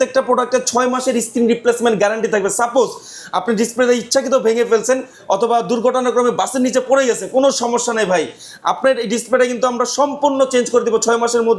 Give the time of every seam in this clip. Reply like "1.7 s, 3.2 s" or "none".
none